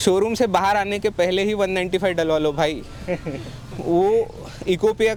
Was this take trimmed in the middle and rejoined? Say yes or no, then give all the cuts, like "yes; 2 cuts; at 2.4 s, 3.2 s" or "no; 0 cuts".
no; 0 cuts